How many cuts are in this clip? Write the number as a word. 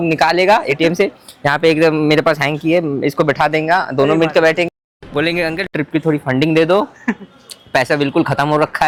zero